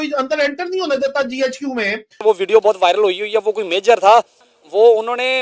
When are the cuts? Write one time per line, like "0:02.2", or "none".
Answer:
0:02.2
0:04.5